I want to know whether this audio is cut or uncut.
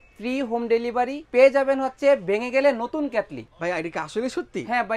cut